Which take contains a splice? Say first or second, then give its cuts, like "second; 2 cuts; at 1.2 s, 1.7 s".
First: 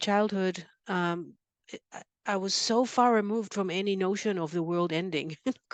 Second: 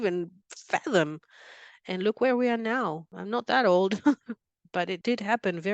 second; 2 cuts; at 3.1 s, 5.0 s